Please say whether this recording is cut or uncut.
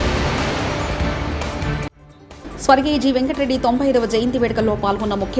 uncut